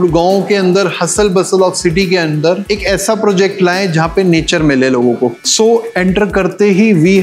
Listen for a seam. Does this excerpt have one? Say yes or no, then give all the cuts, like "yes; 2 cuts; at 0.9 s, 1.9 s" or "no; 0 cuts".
yes; 1 cut; at 5.3 s